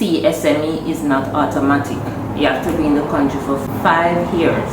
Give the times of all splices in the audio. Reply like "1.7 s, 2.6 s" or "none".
3.6 s